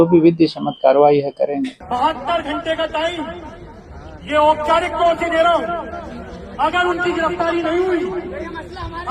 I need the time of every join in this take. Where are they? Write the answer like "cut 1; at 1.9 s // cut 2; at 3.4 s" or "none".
cut 1; at 1.8 s